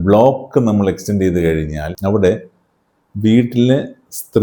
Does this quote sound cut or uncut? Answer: cut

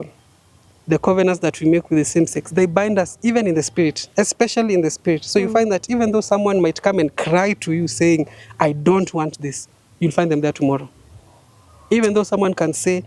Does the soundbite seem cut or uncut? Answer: uncut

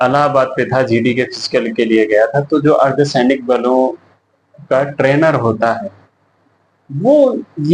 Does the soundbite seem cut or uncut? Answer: uncut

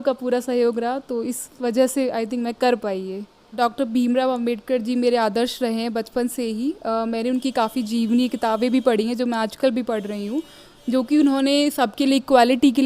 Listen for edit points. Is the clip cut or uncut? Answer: cut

